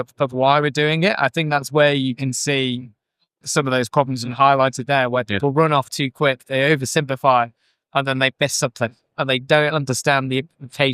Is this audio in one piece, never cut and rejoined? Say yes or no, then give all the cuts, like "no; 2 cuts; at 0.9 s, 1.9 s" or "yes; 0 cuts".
no; 2 cuts; at 3.4 s, 9.1 s